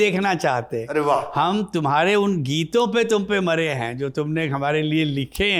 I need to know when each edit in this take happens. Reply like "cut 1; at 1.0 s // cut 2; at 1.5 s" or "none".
none

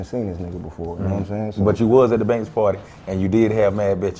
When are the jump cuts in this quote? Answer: none

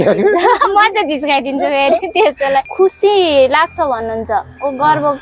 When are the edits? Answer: cut 1; at 2.3 s

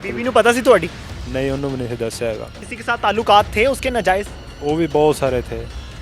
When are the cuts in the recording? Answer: cut 1; at 2.7 s

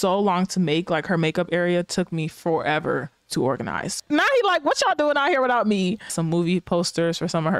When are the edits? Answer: cut 1; at 4.0 s // cut 2; at 6.1 s

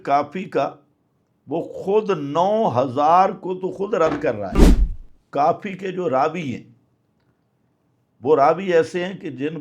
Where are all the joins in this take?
cut 1; at 4.6 s

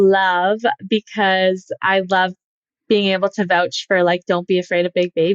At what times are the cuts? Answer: none

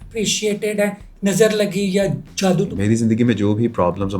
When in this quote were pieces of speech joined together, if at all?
cut 1; at 1.1 s // cut 2; at 2.7 s

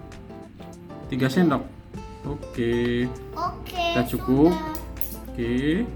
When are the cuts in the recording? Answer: none

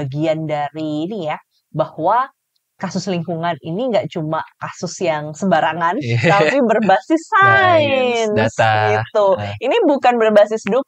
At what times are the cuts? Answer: none

